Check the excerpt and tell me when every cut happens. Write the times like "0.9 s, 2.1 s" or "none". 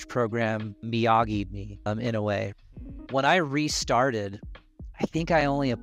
2.5 s

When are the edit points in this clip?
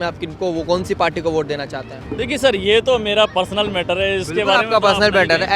none

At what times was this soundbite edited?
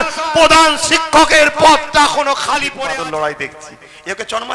2.6 s

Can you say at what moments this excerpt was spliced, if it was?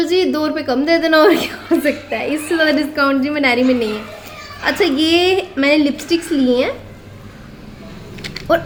none

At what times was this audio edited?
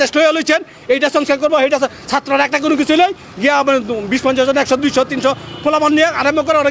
none

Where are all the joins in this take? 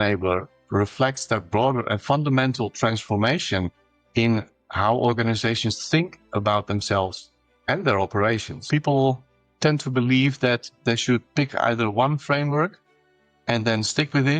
8.7 s

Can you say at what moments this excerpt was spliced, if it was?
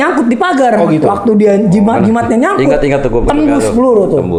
none

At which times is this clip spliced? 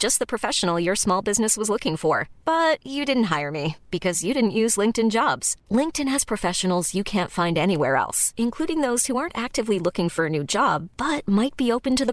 none

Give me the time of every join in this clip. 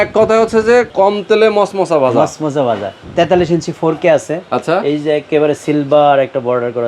0.9 s, 3.0 s

